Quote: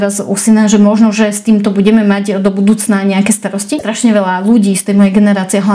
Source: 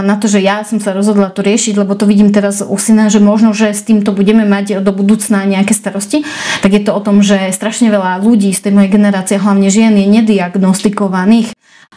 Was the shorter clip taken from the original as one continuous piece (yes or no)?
no